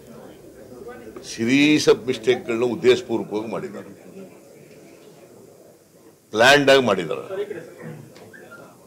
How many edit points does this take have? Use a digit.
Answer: 1